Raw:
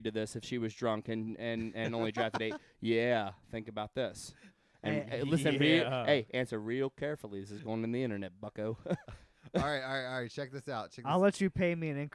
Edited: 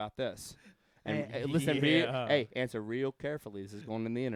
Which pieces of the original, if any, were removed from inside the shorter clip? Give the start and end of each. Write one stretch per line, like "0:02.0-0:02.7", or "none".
none